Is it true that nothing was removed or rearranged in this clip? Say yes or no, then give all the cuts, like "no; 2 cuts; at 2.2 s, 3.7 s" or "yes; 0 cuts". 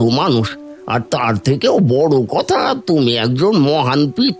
yes; 0 cuts